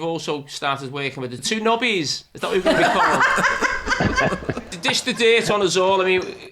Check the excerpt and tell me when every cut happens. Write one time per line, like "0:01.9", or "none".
0:01.4
0:04.8